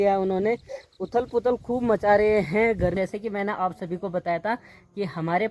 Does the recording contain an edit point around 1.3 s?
no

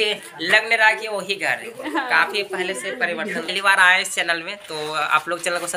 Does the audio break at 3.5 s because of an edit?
yes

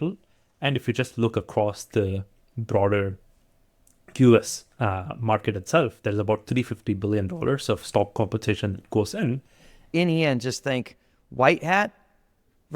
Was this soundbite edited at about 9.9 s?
yes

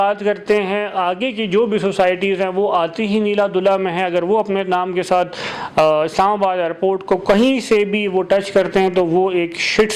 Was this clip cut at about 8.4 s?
no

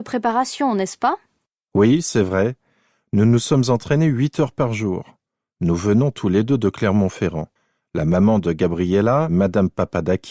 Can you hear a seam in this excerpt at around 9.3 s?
yes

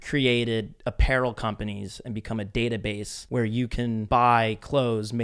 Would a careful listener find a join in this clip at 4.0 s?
yes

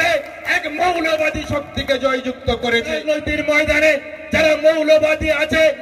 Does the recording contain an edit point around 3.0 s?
yes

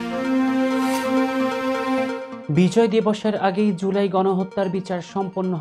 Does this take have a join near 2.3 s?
yes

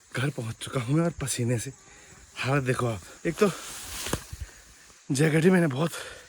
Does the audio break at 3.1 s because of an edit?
yes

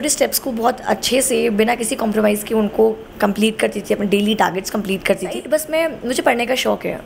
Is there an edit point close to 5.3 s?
yes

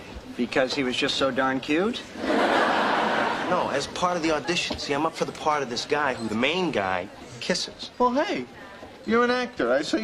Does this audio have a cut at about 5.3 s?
no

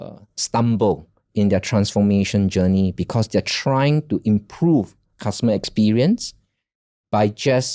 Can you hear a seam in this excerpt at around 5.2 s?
no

